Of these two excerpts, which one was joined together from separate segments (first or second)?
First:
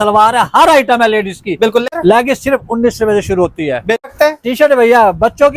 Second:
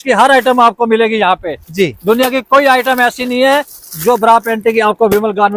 first